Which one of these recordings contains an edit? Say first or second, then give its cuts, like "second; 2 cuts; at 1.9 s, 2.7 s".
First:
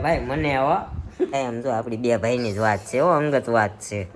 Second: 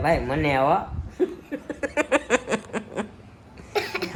first; 1 cut; at 1.3 s